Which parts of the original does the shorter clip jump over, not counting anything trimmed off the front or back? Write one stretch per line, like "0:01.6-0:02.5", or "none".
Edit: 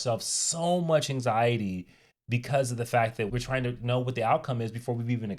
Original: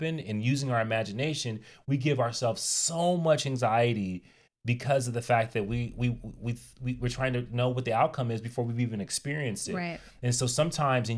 0:05.7-0:07.0